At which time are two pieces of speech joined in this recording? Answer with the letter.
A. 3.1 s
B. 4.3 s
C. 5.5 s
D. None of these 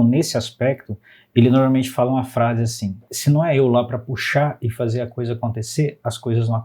A